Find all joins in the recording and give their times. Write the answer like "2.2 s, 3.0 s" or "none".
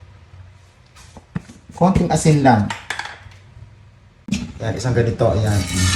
4.2 s